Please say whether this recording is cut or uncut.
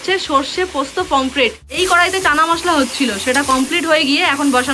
cut